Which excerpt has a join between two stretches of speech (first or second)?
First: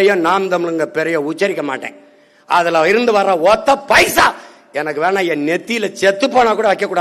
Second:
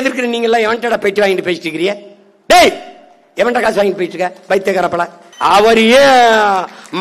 second